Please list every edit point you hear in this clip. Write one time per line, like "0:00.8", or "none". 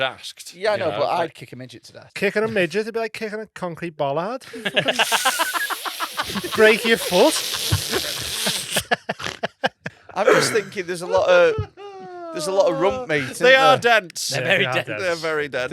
0:02.0
0:09.8